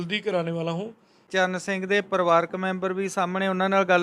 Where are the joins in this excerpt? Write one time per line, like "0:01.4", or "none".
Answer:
0:01.3